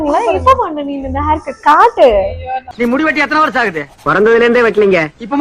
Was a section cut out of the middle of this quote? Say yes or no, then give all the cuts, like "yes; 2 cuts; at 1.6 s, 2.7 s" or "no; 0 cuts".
yes; 1 cut; at 2.6 s